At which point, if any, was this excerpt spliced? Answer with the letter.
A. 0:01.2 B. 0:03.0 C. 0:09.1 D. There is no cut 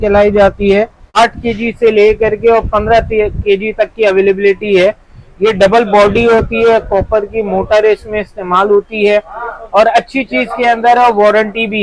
A